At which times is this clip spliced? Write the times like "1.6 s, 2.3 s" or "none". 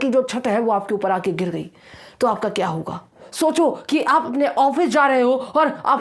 3.3 s